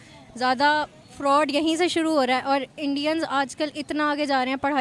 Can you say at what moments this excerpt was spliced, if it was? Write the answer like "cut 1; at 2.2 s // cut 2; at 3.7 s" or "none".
none